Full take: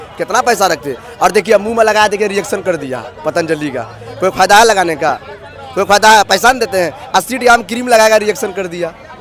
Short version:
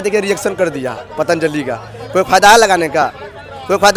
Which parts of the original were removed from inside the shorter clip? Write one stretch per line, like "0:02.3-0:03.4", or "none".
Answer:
none